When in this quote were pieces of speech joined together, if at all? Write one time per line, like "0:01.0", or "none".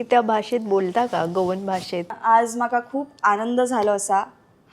0:02.1